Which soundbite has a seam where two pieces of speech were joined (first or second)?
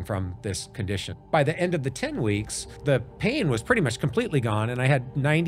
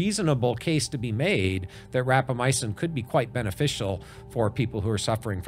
first